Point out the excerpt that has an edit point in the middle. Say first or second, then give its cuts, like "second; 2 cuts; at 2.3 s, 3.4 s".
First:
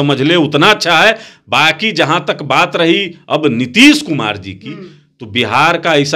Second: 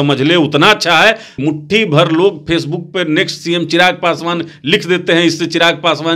second; 1 cut; at 1.3 s